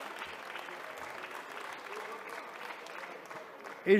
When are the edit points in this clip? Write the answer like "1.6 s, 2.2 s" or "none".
none